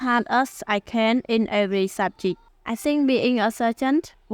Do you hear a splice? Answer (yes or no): yes